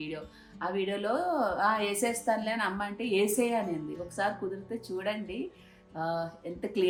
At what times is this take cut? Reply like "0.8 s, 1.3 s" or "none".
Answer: none